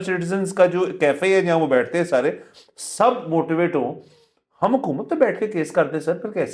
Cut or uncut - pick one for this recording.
uncut